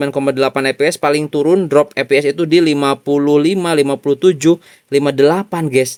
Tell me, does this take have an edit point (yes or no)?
no